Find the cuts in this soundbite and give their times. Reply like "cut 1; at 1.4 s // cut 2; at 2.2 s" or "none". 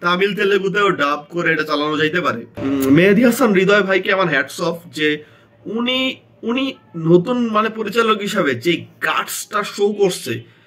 cut 1; at 2.5 s